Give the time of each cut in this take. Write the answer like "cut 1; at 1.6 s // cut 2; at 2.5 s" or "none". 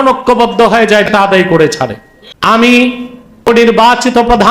cut 1; at 1.1 s // cut 2; at 2.5 s // cut 3; at 3.5 s